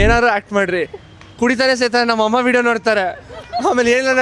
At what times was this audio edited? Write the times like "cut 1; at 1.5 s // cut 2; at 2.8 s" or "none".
none